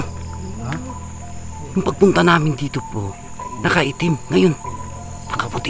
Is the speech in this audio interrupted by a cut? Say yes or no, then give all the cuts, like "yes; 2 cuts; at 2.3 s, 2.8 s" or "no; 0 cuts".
no; 0 cuts